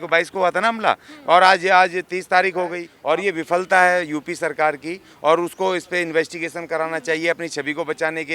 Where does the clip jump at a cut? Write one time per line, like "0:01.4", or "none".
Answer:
0:02.9